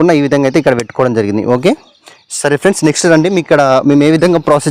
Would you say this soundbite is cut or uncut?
uncut